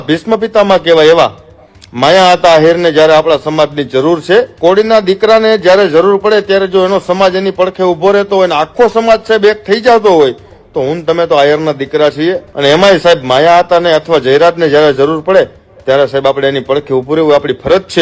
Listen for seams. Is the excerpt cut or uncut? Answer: cut